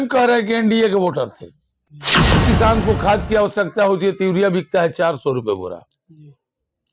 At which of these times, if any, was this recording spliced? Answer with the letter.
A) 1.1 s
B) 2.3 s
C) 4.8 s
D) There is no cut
B